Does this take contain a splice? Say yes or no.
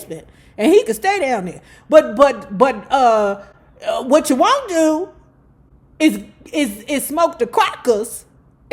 no